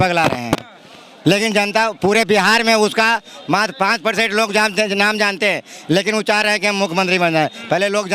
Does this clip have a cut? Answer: no; 0 cuts

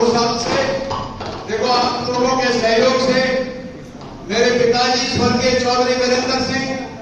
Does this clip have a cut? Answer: no; 0 cuts

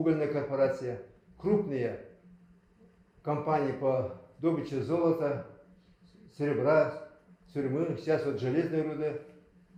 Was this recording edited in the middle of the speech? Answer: no; 0 cuts

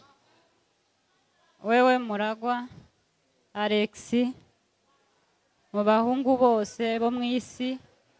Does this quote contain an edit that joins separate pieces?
no; 0 cuts

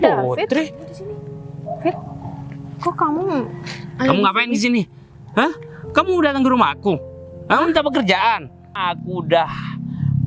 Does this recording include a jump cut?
yes; 1 cut; at 8.7 s

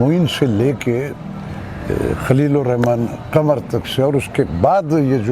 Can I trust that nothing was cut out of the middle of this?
yes; 0 cuts

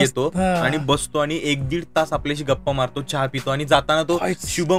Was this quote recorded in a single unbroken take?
yes; 0 cuts

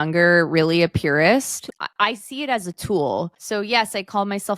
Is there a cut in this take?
yes; 2 cuts; at 1.6 s, 3.4 s

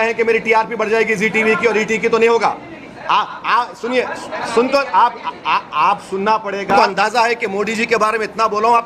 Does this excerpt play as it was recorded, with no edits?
yes; 0 cuts

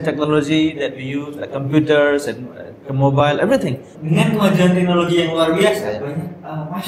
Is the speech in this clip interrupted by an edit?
yes; 1 cut; at 3.9 s

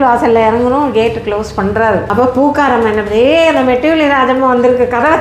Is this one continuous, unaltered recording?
no; 1 cut; at 2.1 s

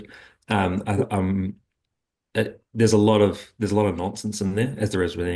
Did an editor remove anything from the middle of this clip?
no; 0 cuts

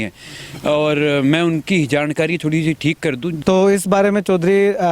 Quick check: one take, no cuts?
no; 1 cut; at 3.3 s

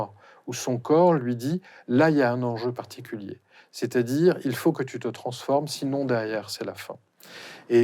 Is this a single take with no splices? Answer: yes; 0 cuts

